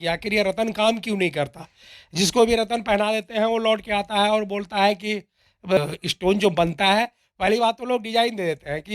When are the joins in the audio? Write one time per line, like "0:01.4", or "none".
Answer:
0:05.8